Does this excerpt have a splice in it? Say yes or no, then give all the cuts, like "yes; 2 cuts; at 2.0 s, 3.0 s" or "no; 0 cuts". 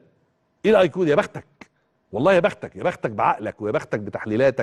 no; 0 cuts